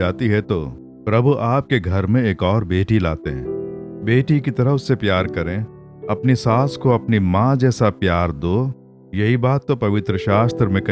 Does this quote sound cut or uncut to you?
uncut